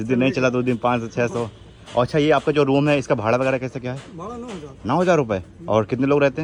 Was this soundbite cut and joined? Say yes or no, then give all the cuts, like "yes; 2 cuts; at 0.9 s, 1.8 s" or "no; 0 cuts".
no; 0 cuts